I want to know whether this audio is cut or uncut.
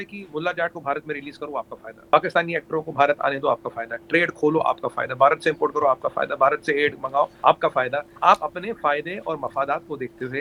uncut